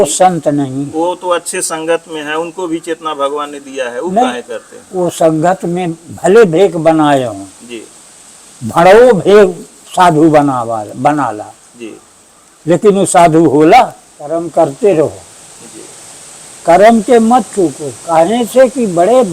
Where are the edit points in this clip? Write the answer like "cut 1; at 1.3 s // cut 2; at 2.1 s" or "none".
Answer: cut 1; at 14.3 s